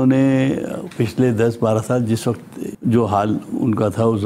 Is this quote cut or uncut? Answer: uncut